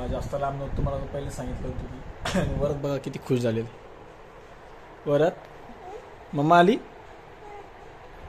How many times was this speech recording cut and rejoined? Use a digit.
0